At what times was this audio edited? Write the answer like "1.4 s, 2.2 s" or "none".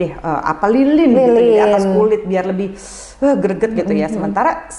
none